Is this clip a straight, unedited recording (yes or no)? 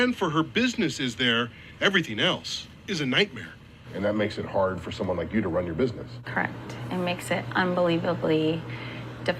yes